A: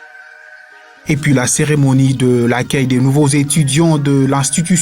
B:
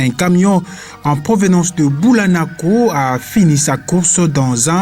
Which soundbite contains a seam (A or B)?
A